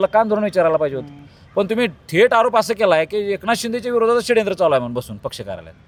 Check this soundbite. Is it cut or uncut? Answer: uncut